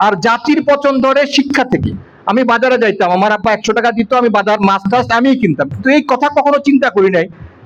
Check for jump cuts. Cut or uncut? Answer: uncut